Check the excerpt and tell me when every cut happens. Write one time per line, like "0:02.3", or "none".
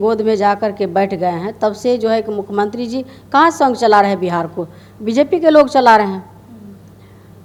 none